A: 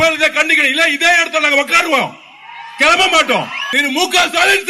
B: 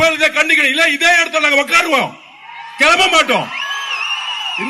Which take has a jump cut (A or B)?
A